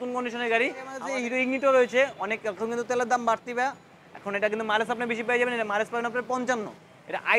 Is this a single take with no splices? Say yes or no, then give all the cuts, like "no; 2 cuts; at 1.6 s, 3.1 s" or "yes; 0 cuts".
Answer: no; 1 cut; at 1.0 s